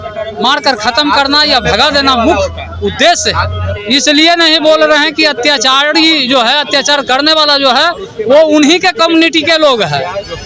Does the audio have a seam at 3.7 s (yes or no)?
yes